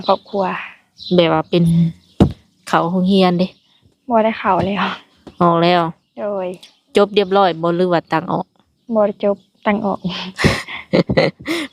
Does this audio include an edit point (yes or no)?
yes